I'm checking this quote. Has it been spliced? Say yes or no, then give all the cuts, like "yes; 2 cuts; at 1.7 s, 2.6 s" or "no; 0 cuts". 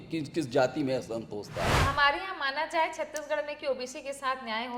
yes; 1 cut; at 1.8 s